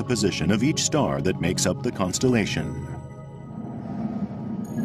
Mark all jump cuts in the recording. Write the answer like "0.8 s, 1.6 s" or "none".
2.6 s